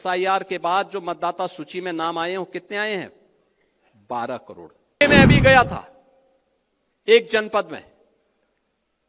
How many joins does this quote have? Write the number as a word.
one